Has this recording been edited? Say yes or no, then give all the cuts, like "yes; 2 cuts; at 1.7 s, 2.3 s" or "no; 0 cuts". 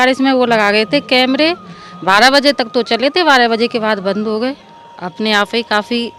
no; 0 cuts